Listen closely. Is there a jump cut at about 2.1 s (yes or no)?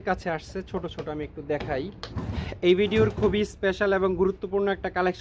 yes